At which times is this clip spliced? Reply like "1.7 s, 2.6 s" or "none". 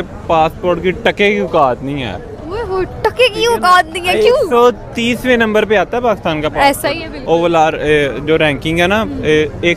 none